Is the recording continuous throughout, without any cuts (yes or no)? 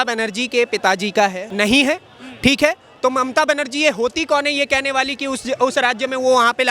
no